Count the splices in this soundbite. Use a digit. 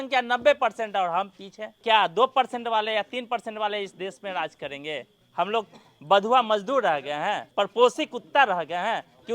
3